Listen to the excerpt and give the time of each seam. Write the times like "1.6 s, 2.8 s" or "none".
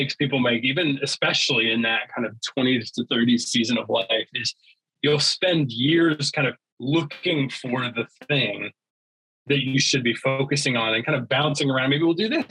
none